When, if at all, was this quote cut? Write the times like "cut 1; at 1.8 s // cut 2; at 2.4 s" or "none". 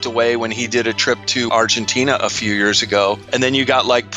cut 1; at 1.5 s // cut 2; at 3.2 s